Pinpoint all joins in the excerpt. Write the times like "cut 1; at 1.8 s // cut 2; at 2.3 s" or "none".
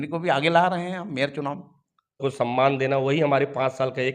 cut 1; at 2.2 s